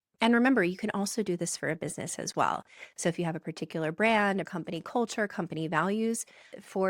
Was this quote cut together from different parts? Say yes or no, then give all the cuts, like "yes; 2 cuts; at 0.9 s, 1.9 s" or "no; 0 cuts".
no; 0 cuts